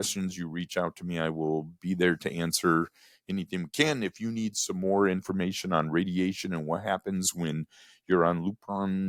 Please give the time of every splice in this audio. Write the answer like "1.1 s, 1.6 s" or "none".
none